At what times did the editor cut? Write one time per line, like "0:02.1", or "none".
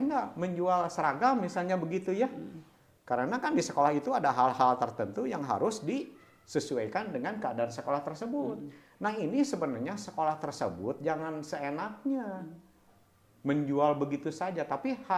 none